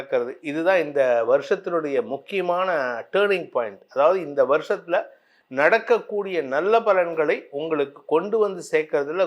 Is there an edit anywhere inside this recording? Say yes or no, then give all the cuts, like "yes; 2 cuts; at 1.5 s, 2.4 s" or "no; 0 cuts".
no; 0 cuts